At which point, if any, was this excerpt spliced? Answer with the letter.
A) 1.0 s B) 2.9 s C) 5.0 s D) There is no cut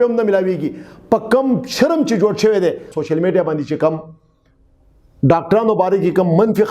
B